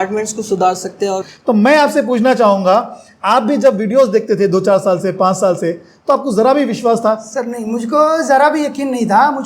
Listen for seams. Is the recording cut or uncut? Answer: cut